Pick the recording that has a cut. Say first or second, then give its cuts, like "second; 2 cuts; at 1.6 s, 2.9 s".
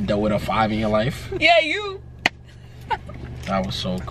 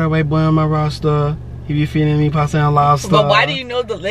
first; 1 cut; at 1.2 s